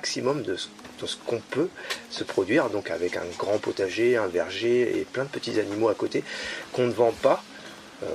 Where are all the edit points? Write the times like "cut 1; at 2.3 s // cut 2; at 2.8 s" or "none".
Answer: none